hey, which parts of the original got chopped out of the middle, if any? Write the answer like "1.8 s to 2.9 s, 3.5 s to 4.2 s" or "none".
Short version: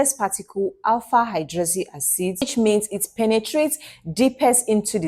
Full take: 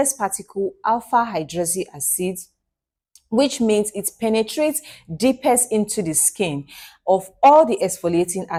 2.4 s to 3.5 s